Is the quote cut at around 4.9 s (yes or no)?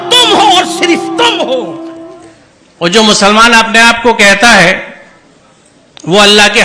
no